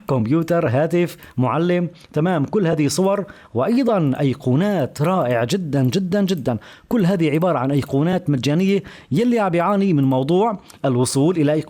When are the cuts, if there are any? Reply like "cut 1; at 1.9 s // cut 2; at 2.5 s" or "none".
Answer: none